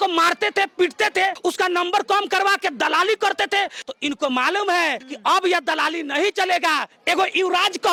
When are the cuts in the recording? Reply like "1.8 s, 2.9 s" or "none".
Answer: none